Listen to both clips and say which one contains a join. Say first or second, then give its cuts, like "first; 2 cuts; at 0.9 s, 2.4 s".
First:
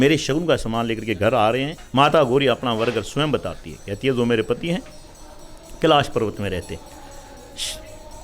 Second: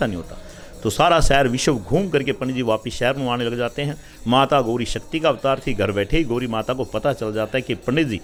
first; 1 cut; at 1.8 s